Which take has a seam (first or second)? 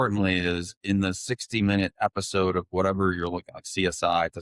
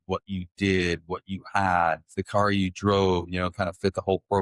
second